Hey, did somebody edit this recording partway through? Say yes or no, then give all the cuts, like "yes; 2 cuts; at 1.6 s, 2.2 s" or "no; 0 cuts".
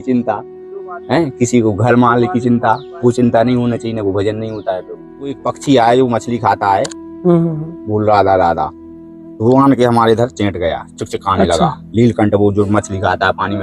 yes; 1 cut; at 5.5 s